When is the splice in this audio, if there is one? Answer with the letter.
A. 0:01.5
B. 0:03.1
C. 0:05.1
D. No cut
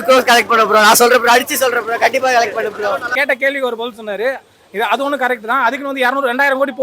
B